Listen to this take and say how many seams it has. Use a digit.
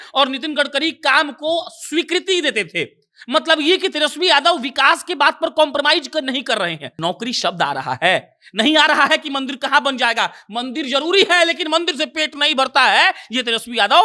1